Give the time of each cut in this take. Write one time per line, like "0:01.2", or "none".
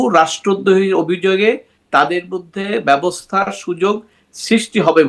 none